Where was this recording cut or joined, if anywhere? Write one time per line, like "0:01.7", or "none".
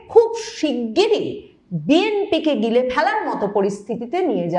none

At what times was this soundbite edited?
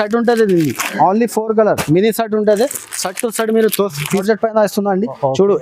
0:04.2

